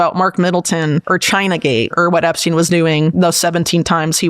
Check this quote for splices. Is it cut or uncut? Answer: cut